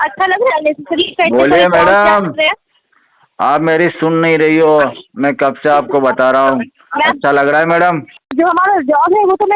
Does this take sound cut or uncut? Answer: cut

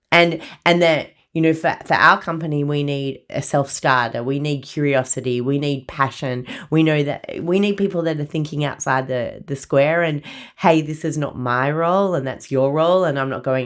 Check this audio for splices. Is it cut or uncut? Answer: uncut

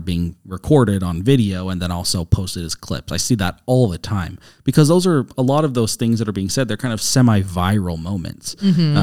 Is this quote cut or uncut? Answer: uncut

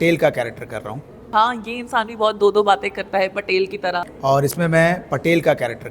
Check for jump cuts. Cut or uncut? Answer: cut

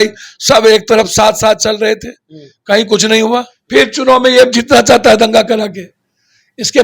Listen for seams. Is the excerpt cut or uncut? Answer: cut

